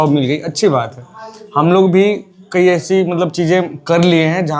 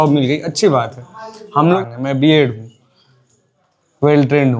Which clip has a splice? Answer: second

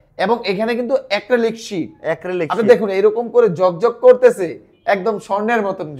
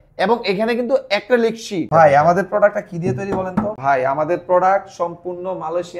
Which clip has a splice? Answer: second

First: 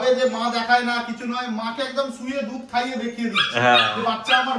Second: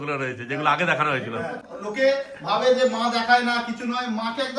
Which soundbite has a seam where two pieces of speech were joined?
second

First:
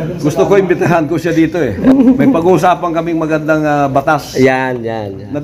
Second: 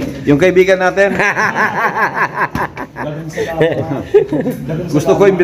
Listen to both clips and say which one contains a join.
first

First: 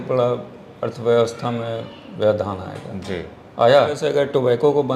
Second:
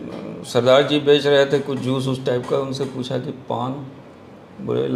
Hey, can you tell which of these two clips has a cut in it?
first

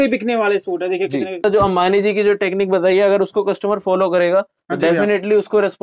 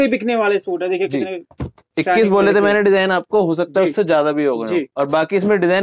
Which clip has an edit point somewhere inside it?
first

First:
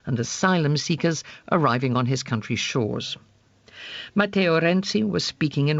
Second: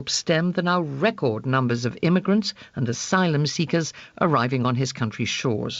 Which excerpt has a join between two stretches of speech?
second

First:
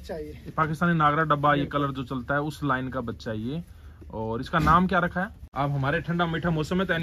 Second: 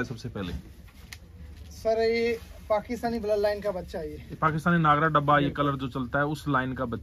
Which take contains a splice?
first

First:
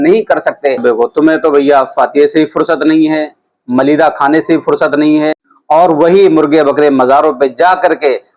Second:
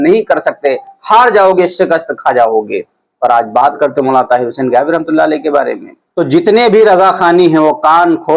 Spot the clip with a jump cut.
first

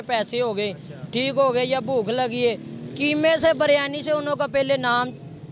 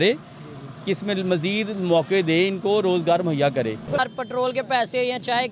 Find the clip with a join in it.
second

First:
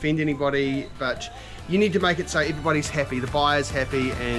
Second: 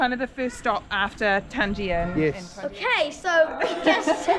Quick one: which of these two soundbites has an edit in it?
second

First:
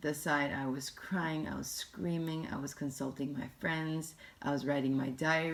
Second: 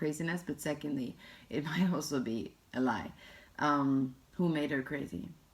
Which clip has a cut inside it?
second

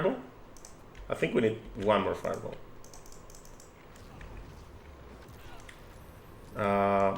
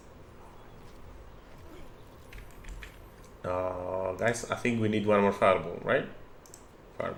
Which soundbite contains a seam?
first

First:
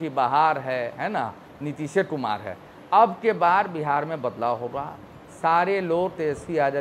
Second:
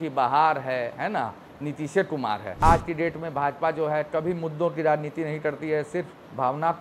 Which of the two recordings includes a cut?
second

